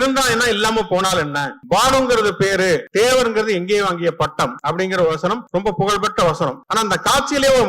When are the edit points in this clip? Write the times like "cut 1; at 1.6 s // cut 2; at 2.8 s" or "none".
cut 1; at 1.5 s // cut 2; at 2.9 s // cut 3; at 4.6 s // cut 4; at 5.4 s // cut 5; at 6.6 s